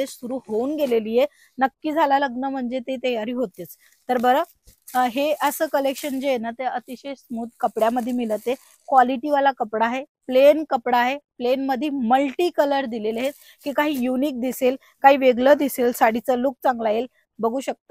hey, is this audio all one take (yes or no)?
yes